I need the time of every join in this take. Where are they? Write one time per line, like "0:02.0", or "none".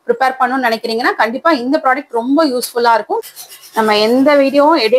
0:03.2